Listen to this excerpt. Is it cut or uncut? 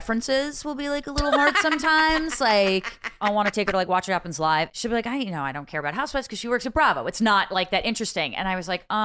cut